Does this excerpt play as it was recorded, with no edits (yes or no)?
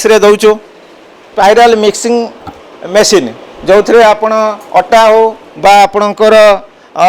no